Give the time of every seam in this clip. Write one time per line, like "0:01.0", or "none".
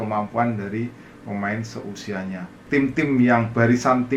0:02.6

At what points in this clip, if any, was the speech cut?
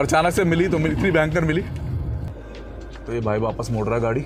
0:02.4

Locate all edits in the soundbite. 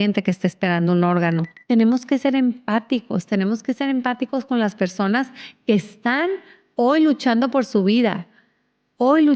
0:01.5

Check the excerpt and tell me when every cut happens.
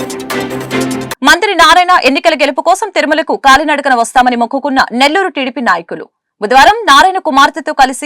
0:01.1

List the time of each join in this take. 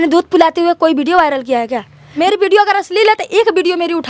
0:02.2

